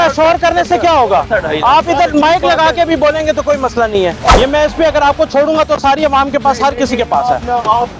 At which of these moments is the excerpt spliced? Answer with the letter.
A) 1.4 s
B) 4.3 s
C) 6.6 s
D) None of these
B